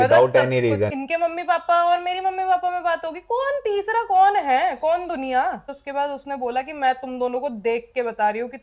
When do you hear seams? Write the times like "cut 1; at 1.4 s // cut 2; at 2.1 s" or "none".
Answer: cut 1; at 1.0 s // cut 2; at 5.7 s